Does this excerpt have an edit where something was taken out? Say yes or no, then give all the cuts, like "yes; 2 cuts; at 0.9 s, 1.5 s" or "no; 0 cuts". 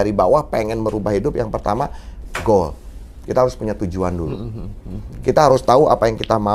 no; 0 cuts